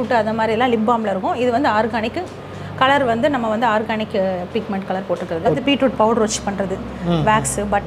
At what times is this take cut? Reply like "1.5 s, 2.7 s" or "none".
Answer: 5.6 s

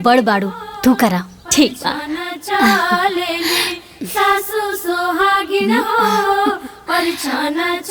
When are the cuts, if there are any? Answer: none

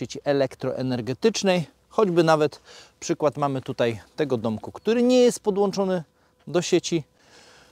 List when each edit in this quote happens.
none

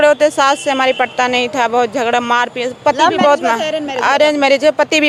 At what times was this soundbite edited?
none

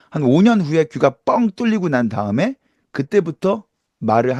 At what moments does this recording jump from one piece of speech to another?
none

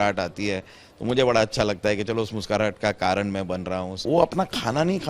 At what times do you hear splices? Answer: 3.9 s

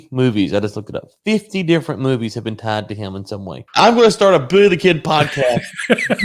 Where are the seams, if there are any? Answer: 3.6 s

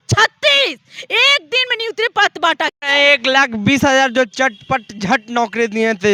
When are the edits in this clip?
none

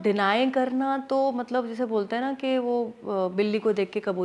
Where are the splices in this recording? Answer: none

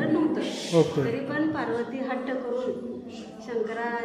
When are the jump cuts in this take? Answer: none

